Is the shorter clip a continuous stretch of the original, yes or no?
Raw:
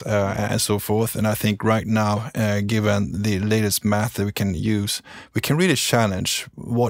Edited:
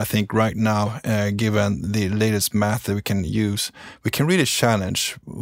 yes